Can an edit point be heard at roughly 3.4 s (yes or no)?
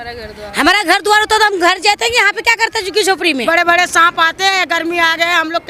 yes